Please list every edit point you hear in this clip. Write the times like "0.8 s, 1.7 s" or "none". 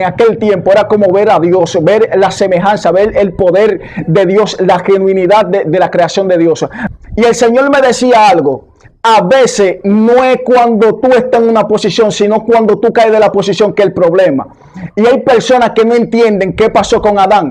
6.8 s